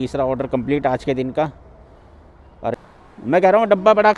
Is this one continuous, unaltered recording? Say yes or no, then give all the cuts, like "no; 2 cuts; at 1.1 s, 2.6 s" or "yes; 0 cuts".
no; 1 cut; at 2.8 s